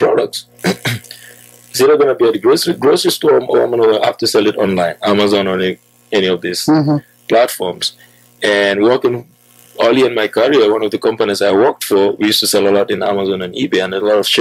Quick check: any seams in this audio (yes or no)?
no